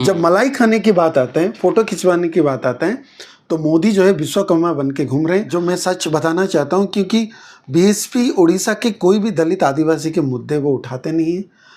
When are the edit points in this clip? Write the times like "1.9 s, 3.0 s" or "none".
5.5 s